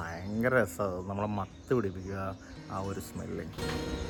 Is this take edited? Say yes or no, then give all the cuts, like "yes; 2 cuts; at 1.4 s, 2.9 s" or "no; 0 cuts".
no; 0 cuts